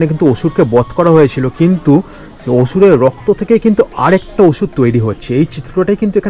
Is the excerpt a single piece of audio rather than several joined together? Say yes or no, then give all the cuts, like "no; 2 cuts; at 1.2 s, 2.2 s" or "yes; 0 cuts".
yes; 0 cuts